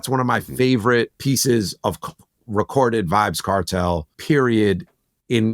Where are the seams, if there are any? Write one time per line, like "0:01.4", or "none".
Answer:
0:01.2
0:04.1